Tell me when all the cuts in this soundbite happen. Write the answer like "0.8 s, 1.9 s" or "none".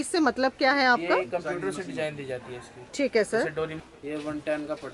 3.8 s